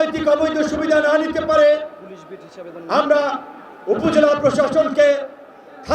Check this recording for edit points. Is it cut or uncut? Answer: uncut